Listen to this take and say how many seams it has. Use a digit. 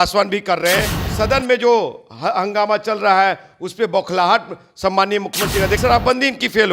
2